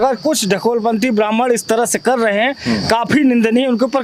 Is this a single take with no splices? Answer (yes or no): yes